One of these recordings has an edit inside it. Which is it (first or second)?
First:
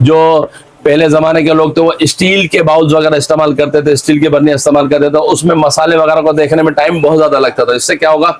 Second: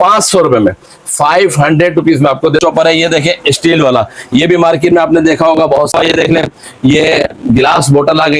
second